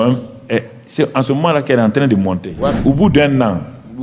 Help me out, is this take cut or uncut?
cut